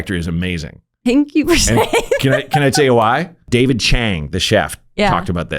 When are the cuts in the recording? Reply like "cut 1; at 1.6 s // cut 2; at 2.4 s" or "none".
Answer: cut 1; at 3.5 s